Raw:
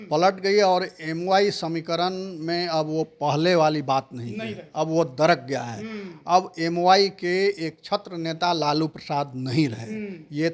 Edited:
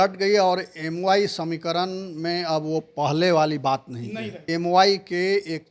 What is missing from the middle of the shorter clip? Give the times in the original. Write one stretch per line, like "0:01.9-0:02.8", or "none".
0:04.6-0:06.5